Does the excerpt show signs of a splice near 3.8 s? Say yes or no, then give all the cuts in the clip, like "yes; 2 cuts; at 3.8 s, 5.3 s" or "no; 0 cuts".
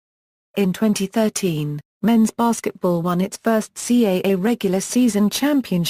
yes; 1 cut; at 3.8 s